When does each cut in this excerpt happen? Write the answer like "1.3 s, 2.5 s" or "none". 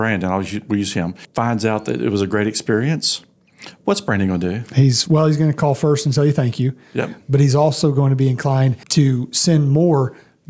1.2 s, 8.8 s